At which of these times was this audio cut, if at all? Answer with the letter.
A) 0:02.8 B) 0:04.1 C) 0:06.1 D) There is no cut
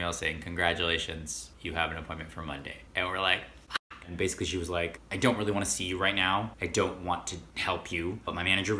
B